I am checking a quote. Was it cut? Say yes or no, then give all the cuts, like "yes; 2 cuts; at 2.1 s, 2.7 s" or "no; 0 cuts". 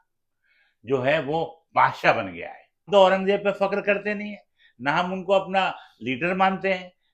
yes; 1 cut; at 2.9 s